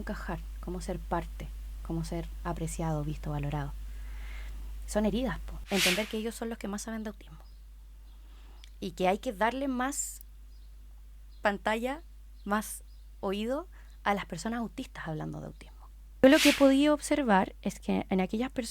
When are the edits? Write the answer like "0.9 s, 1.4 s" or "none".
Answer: 5.6 s, 16.2 s